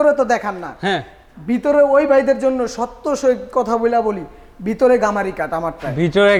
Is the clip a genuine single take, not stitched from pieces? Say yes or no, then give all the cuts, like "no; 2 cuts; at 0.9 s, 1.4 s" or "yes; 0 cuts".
yes; 0 cuts